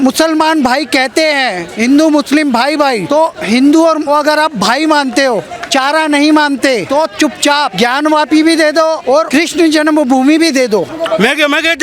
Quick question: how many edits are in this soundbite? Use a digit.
6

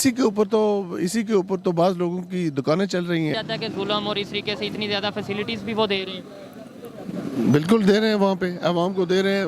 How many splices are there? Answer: 1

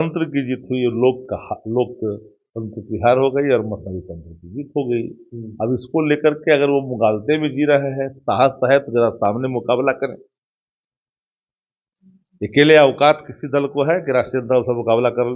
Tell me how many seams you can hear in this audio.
0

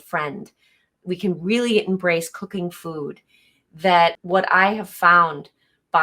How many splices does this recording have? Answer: 1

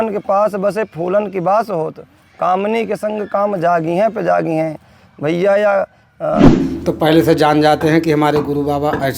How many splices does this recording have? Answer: 1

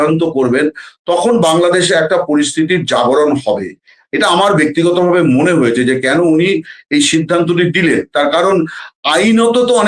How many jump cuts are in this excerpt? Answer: 0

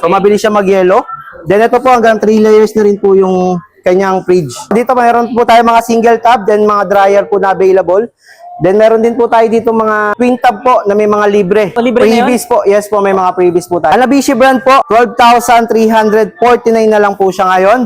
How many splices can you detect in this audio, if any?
5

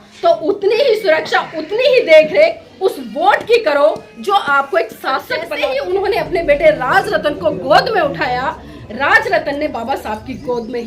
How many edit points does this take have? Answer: 1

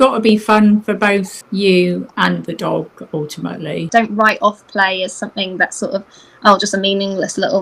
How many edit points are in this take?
2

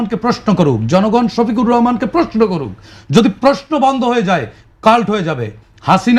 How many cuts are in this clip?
0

